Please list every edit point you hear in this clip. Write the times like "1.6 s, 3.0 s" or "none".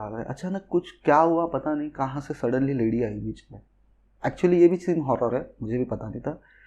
none